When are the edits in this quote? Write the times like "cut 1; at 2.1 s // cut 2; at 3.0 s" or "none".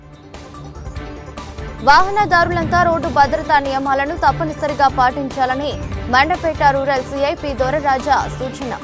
cut 1; at 1.6 s